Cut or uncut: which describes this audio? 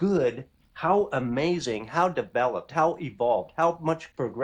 uncut